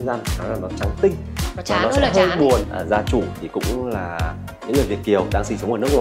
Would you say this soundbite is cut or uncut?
cut